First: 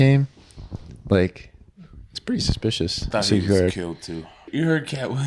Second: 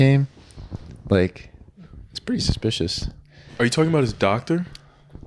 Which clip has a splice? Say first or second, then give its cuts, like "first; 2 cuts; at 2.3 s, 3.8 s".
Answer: first; 2 cuts; at 3.1 s, 4.4 s